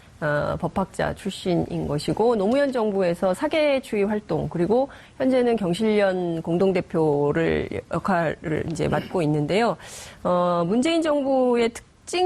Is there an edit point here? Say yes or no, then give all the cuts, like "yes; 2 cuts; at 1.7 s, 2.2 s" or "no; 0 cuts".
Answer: no; 0 cuts